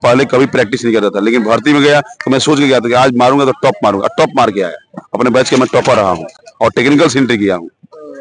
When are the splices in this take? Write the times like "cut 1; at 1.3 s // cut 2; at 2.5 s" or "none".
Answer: none